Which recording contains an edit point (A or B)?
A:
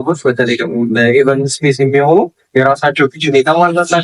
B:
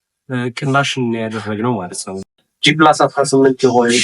B